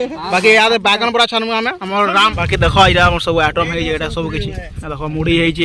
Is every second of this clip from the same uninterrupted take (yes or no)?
no